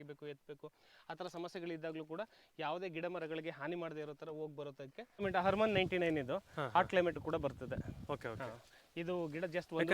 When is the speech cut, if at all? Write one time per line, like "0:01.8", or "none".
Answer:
0:05.2